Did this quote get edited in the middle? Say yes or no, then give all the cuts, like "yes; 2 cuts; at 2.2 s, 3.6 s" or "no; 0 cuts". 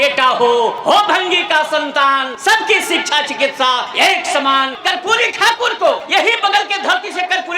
yes; 5 cuts; at 0.8 s, 2.3 s, 3.9 s, 4.8 s, 6.0 s